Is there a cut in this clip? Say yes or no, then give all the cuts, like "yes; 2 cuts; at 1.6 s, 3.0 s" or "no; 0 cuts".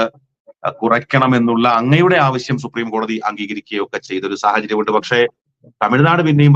no; 0 cuts